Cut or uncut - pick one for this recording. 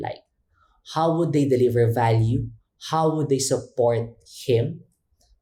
uncut